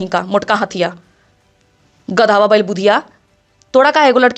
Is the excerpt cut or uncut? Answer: uncut